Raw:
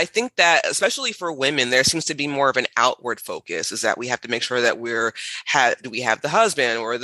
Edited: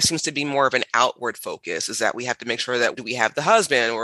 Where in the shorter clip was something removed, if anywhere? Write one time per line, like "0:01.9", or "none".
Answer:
0:03.0